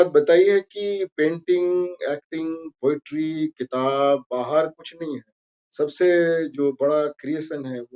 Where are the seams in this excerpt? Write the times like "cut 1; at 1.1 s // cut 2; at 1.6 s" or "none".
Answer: none